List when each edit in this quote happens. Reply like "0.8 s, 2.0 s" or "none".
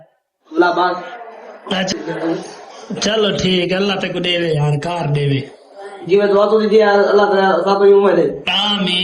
1.9 s